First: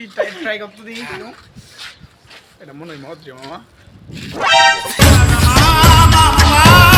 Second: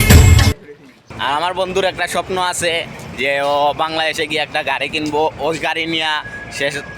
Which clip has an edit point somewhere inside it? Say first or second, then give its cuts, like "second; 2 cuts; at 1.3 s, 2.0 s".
second; 1 cut; at 1.1 s